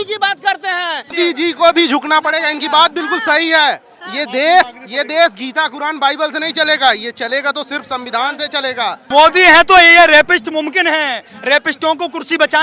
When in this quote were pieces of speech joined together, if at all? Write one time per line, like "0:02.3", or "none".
0:01.1
0:09.0